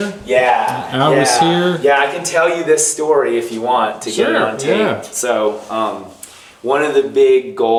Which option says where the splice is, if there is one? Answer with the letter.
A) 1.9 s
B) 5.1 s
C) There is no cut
C